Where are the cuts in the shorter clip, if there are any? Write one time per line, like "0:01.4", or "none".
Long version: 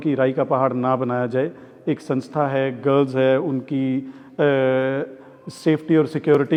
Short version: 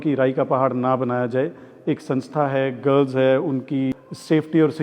0:03.9